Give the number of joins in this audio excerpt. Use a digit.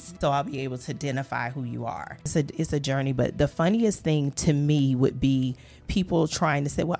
1